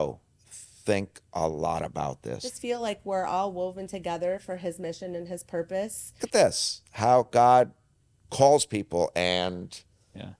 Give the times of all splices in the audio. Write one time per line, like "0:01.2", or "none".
0:02.4
0:06.2